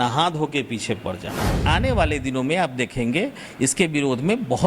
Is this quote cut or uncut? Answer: cut